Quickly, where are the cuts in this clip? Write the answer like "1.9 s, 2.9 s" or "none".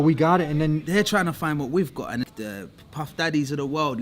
2.2 s